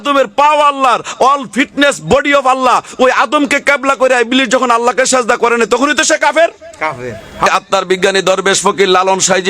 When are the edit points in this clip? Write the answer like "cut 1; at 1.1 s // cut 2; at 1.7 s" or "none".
cut 1; at 7.5 s

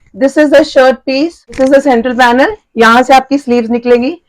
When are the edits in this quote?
cut 1; at 1.6 s

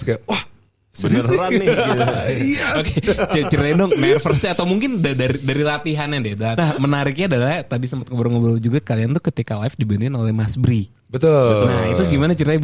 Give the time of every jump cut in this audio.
cut 1; at 6.5 s

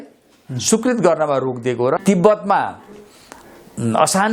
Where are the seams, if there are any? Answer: cut 1; at 2.0 s

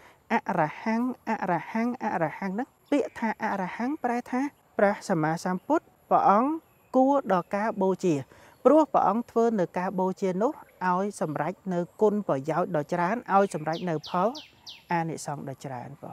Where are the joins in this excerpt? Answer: cut 1; at 2.8 s // cut 2; at 4.6 s // cut 3; at 5.9 s

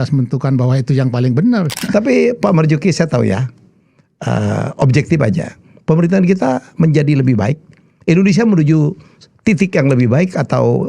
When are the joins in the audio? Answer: cut 1; at 1.8 s

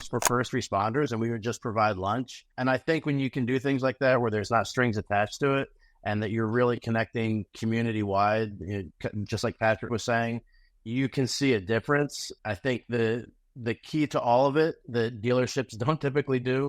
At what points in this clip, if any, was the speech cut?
cut 1; at 12.3 s

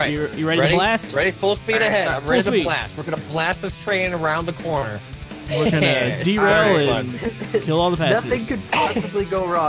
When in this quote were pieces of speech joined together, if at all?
none

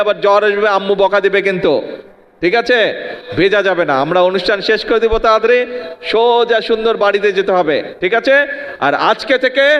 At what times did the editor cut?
none

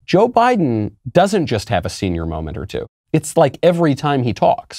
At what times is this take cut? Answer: cut 1; at 1.0 s // cut 2; at 2.9 s

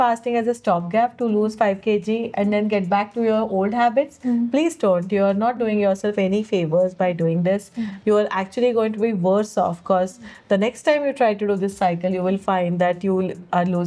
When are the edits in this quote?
none

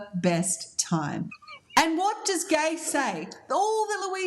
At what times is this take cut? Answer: cut 1; at 1.5 s

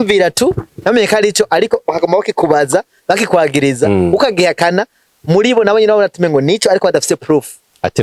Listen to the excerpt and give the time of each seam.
none

